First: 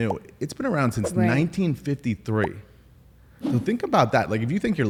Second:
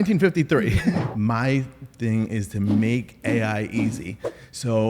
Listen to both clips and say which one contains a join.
second; 1 cut; at 1.1 s

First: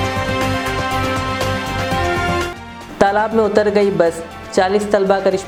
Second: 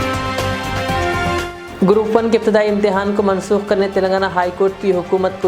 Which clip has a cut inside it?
second; 1 cut; at 1.5 s

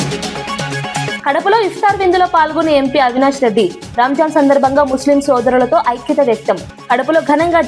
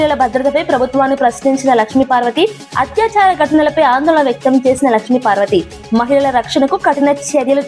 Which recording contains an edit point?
first; 1 cut; at 1.2 s

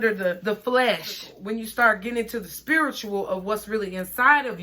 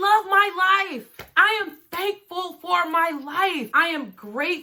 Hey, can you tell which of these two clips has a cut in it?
first; 1 cut; at 1.3 s

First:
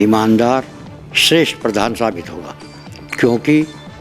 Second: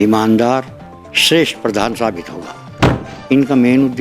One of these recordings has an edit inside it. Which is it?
second; 1 cut; at 3.0 s

